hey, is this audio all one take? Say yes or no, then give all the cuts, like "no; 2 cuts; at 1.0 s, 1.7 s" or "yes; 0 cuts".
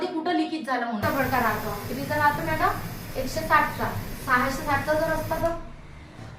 no; 1 cut; at 1.0 s